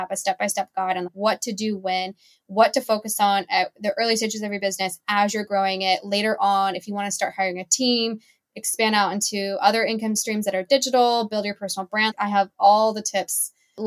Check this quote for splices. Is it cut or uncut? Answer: uncut